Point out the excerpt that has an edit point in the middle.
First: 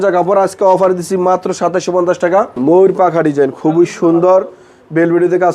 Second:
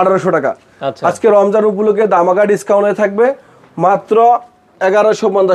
first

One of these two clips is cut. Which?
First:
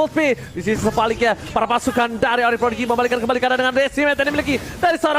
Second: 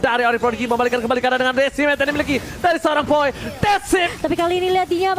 second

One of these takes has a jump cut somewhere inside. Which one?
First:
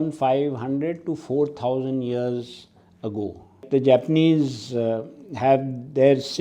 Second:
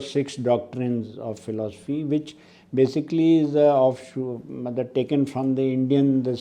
first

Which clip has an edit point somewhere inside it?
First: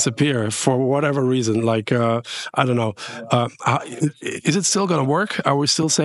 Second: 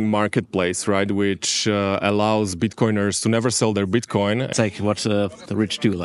second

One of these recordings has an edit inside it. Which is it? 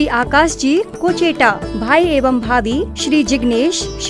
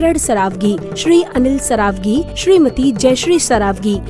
second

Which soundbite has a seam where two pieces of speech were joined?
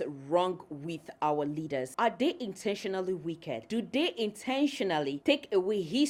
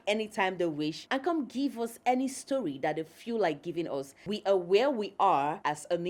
second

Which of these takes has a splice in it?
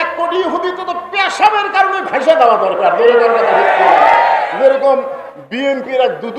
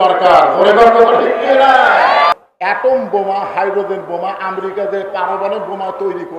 second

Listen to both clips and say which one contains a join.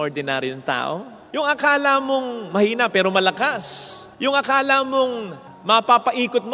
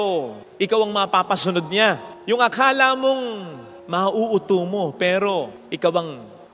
first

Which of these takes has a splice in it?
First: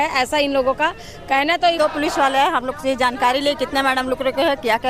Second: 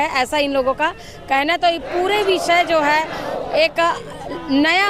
first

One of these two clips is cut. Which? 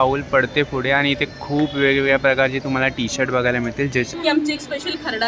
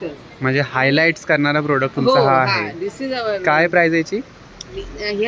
first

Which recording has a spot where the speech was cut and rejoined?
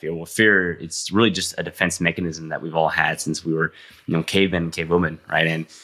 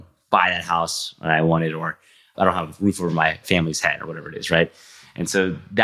second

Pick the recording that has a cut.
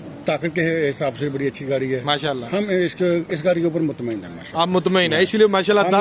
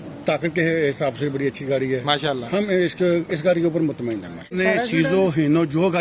second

